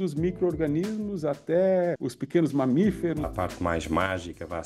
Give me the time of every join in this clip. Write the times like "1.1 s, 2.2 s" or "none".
2.1 s, 3.3 s